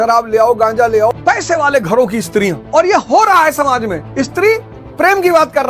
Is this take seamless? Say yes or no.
no